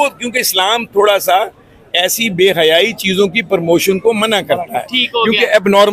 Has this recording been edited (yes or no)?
no